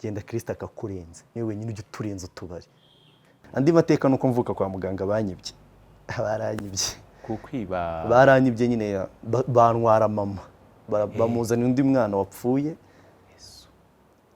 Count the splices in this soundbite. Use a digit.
1